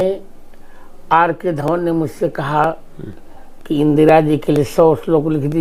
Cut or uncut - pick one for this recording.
uncut